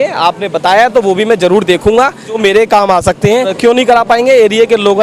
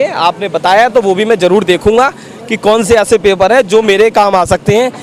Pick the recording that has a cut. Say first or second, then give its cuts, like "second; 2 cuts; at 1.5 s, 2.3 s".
first; 2 cuts; at 2.4 s, 3.5 s